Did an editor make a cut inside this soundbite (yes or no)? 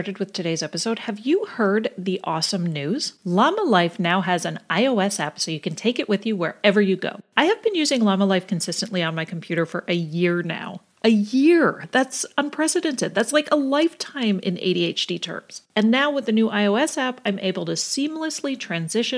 no